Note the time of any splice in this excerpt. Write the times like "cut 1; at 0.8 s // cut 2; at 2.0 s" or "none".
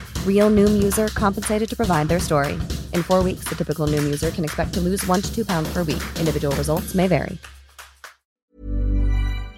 cut 1; at 8.2 s